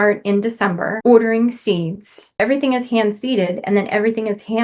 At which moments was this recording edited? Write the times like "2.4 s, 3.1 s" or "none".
0.9 s, 2.4 s

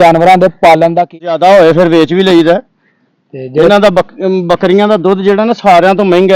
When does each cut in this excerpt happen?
1.1 s

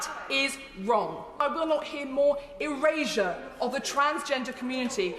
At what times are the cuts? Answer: 1.4 s

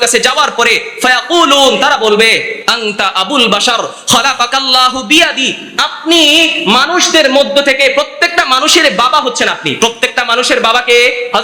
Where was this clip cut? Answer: none

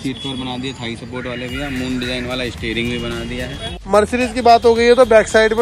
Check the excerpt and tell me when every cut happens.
3.6 s

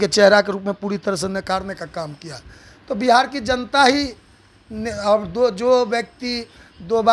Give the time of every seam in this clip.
none

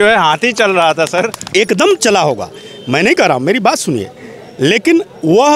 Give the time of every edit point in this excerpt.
none

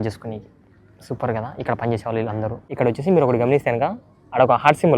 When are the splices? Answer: 2.6 s

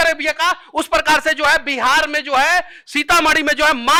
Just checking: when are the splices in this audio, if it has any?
none

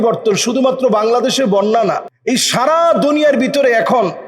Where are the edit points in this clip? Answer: 2.1 s

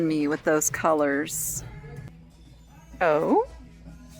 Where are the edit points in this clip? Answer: 2.1 s

